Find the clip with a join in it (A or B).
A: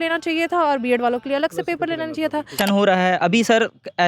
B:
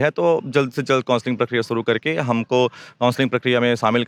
A